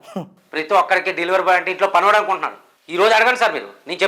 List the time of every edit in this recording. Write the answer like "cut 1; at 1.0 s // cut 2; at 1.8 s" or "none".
none